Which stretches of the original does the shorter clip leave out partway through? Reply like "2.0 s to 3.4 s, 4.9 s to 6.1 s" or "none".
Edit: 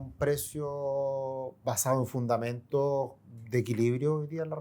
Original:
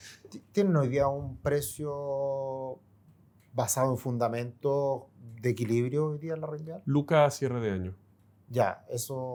2.8 s to 3.4 s